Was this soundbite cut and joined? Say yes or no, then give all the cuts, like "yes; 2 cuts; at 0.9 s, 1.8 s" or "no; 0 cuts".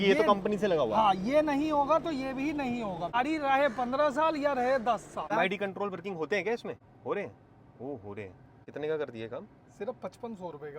yes; 4 cuts; at 3.1 s, 5.3 s, 6.9 s, 8.6 s